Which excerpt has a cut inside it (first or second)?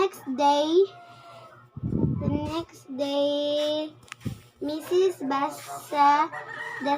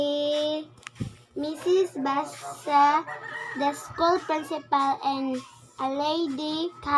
second